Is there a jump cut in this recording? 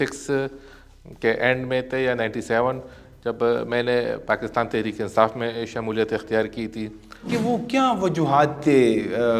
yes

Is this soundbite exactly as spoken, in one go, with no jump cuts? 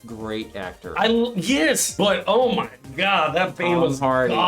no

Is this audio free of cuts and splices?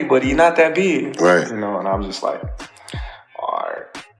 yes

